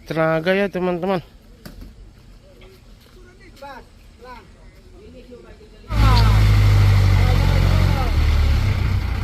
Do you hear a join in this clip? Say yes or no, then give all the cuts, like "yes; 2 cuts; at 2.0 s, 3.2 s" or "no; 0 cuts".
yes; 1 cut; at 6.0 s